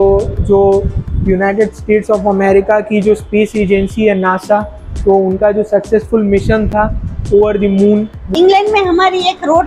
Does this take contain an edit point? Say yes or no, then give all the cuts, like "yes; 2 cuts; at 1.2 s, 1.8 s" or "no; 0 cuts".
yes; 1 cut; at 8.2 s